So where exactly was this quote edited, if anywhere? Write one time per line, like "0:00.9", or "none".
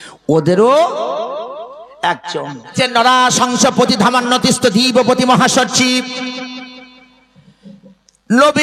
0:02.7